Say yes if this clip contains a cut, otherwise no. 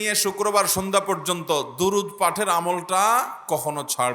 no